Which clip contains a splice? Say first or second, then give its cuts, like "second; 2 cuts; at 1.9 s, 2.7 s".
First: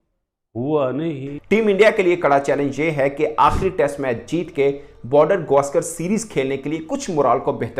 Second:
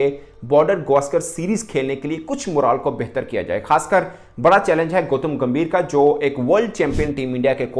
first; 1 cut; at 1.3 s